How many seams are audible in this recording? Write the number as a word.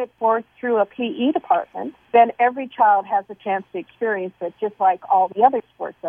zero